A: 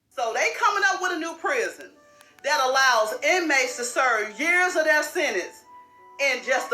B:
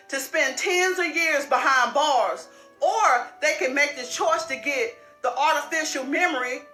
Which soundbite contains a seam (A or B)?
A